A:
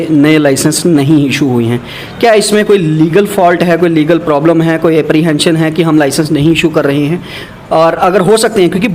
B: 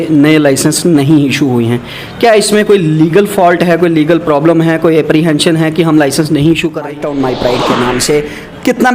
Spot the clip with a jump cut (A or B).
B